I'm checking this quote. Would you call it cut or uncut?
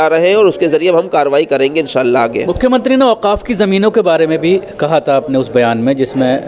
uncut